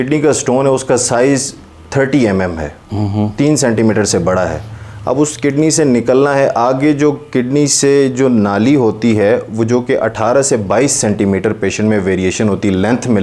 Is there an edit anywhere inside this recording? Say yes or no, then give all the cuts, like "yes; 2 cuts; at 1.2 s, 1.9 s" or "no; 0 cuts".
no; 0 cuts